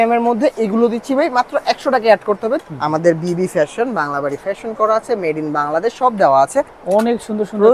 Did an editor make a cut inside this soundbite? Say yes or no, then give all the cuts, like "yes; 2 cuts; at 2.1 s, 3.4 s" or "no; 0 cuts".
yes; 2 cuts; at 2.6 s, 6.8 s